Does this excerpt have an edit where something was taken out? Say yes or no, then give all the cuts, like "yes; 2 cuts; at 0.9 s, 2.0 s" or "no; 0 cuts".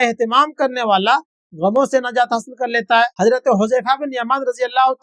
yes; 1 cut; at 3.1 s